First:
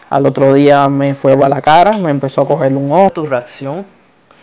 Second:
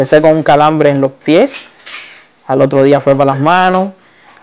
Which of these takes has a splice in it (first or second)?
first